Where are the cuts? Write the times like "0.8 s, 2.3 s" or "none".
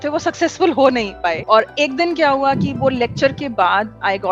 1.4 s